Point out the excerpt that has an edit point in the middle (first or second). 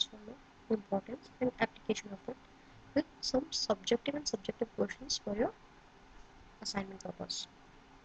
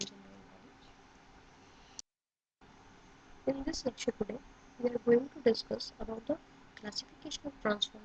second